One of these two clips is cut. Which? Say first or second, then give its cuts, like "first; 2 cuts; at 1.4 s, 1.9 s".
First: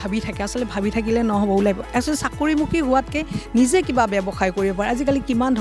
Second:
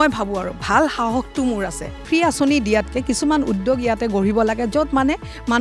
second; 1 cut; at 2.0 s